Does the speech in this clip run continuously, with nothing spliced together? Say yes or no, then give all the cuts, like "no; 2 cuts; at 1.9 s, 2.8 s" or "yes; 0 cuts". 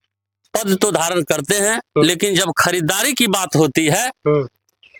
yes; 0 cuts